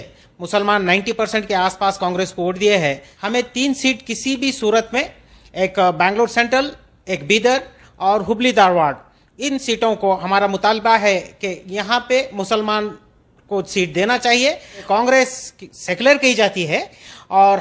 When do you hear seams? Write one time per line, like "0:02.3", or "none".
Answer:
0:03.1
0:14.8